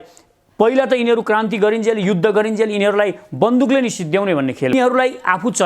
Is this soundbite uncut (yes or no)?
no